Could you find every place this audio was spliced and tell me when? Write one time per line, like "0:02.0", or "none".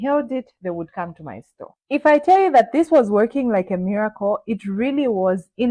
none